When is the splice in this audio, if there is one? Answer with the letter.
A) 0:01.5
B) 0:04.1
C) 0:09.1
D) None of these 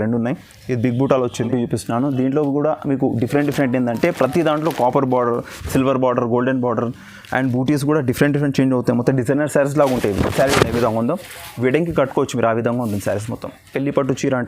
A